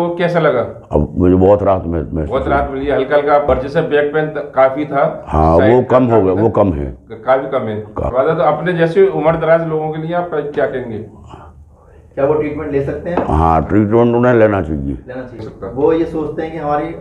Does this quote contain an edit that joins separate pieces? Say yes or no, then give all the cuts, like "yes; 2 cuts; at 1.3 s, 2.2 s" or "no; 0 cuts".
yes; 3 cuts; at 3.4 s, 8.0 s, 15.4 s